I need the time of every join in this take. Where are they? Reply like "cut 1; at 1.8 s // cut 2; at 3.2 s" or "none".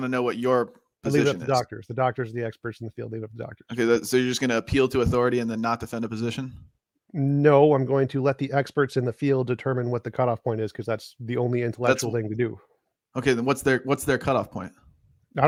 none